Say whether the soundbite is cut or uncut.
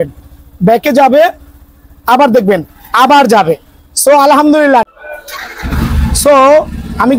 cut